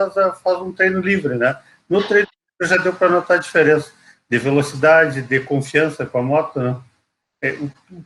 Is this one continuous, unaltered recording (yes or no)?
yes